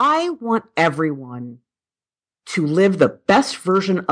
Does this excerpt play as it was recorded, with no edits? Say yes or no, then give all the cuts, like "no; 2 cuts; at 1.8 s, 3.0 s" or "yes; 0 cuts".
yes; 0 cuts